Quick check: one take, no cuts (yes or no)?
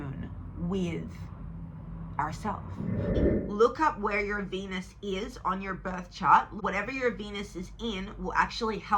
no